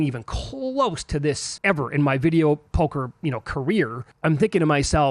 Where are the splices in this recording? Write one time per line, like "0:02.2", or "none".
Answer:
0:01.5
0:04.0